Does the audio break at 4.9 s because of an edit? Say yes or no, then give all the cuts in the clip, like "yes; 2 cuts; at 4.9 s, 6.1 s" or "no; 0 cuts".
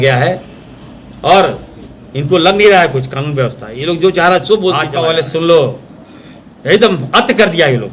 yes; 1 cut; at 4.9 s